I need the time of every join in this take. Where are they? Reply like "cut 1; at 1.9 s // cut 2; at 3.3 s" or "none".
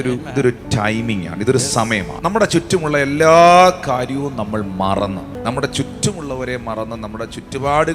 cut 1; at 2.1 s // cut 2; at 5.4 s